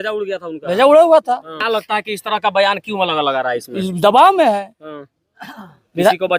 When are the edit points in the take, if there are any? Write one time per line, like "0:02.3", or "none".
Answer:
0:01.6